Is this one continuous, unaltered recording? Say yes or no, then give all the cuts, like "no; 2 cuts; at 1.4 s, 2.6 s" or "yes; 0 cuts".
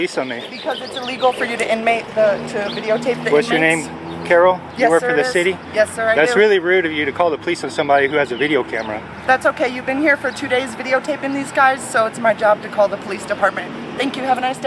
yes; 0 cuts